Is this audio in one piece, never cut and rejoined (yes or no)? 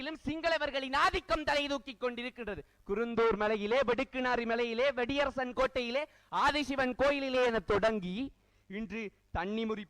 yes